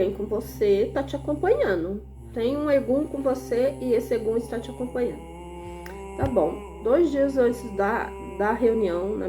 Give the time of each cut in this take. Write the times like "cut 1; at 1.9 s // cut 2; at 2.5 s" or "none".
cut 1; at 2.2 s